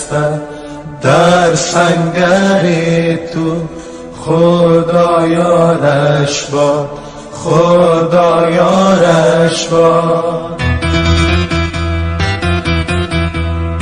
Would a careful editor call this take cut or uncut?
cut